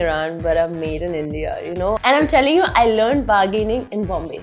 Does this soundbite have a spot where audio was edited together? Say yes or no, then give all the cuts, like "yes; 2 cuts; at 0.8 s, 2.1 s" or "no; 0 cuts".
yes; 1 cut; at 2.0 s